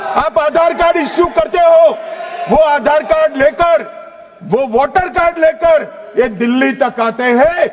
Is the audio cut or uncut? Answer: uncut